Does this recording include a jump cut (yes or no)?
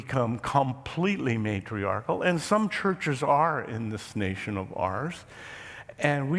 no